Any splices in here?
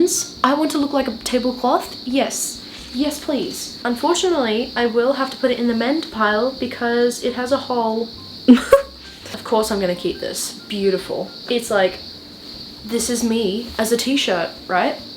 no; 0 cuts

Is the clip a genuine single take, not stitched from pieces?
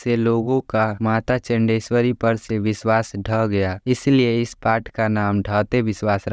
yes; 0 cuts

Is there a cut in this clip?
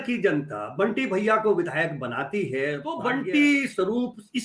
yes; 1 cut; at 3.0 s

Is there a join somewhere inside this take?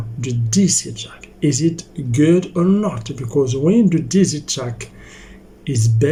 no; 0 cuts

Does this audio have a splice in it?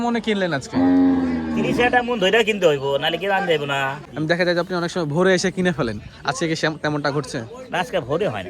yes; 1 cut; at 4.0 s

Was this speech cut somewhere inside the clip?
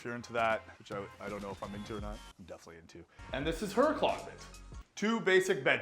yes; 1 cut; at 3.1 s

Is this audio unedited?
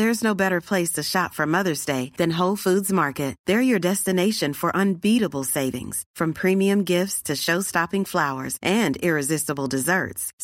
yes; 0 cuts

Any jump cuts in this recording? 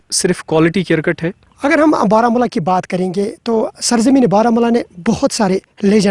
yes; 1 cut; at 1.4 s

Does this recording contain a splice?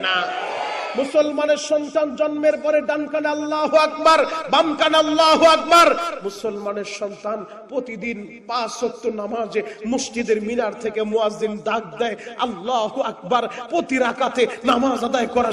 no; 0 cuts

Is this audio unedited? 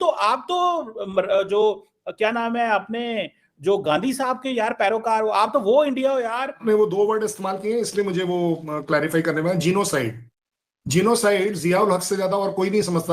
no; 1 cut; at 6.6 s

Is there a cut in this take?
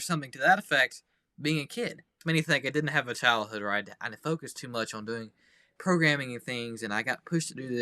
yes; 1 cut; at 2.2 s

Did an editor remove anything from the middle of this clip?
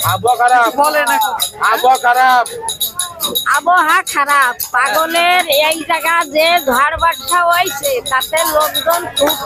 no; 0 cuts

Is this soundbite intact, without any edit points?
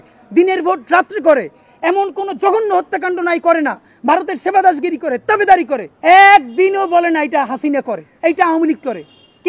no; 2 cuts; at 5.8 s, 8.0 s

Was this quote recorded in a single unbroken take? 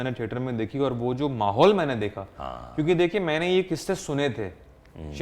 yes; 0 cuts

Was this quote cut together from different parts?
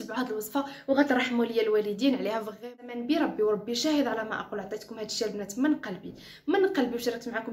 yes; 1 cut; at 2.7 s

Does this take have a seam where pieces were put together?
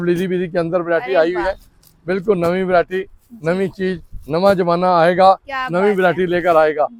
no; 0 cuts

